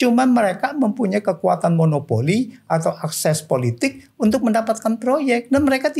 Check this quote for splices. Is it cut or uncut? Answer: uncut